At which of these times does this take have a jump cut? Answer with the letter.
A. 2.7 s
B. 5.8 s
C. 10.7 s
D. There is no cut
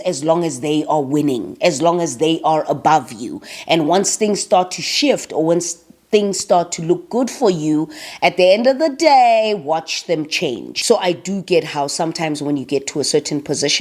C